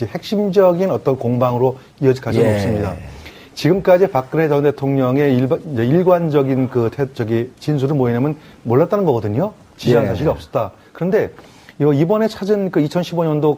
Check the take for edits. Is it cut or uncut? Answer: cut